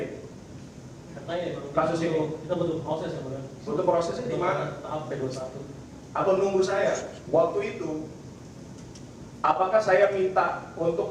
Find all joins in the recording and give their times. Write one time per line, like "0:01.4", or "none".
0:07.1